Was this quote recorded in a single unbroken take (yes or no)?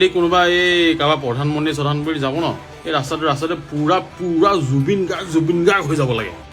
yes